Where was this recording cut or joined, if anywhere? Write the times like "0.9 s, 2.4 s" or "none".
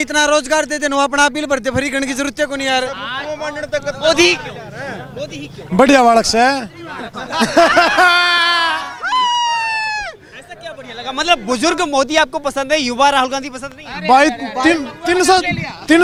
none